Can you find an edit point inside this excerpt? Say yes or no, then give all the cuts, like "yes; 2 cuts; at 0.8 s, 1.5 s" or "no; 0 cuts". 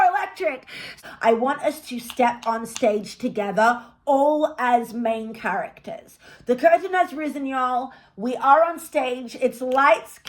yes; 1 cut; at 0.9 s